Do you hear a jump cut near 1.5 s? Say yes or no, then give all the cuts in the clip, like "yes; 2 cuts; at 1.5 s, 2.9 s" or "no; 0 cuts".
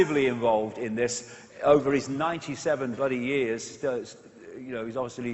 yes; 1 cut; at 1.5 s